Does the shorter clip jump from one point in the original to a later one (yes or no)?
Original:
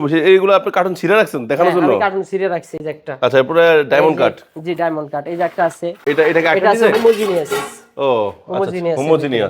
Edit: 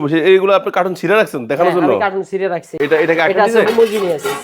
yes